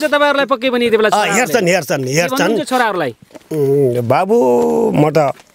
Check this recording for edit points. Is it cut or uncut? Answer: uncut